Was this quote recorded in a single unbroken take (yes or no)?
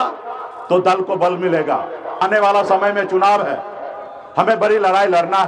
no